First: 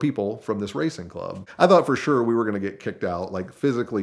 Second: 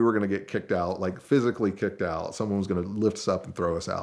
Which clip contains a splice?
first; 1 cut; at 1.4 s

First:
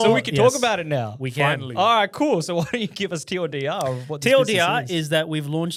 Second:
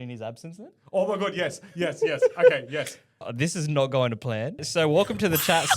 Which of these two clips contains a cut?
second; 2 cuts; at 3.2 s, 4.7 s

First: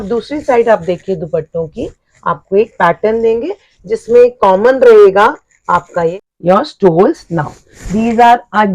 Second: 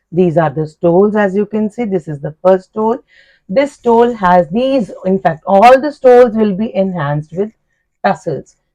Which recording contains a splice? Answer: first; 1 cut; at 6.3 s

